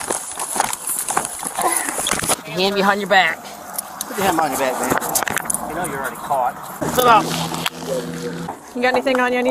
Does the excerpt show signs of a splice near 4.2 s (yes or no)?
no